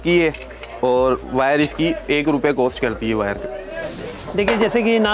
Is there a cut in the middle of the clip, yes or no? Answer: yes